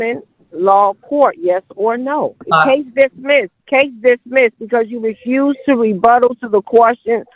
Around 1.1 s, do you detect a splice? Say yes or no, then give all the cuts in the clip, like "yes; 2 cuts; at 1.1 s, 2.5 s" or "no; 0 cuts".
no; 2 cuts; at 2.4 s, 3.6 s